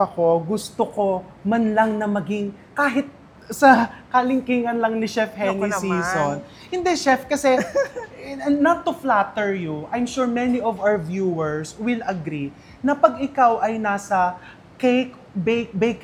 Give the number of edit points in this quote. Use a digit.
0